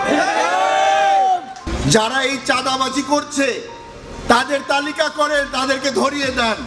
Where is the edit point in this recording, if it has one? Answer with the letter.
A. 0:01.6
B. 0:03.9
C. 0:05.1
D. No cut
A